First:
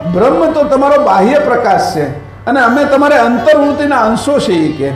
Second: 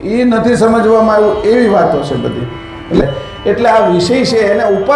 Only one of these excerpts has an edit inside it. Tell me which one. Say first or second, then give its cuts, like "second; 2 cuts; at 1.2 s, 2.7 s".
second; 1 cut; at 3.0 s